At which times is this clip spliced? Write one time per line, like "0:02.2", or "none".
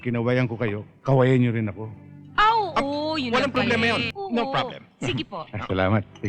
0:04.1